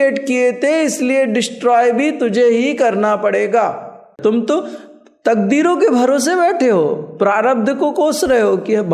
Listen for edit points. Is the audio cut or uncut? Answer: cut